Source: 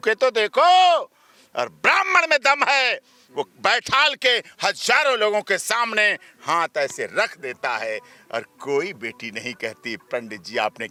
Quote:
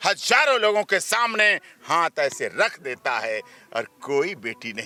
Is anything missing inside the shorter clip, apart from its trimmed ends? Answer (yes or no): no